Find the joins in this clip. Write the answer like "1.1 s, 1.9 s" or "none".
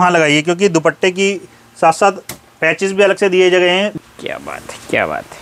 3.9 s